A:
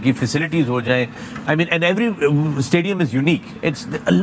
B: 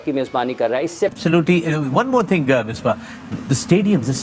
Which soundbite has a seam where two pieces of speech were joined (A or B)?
B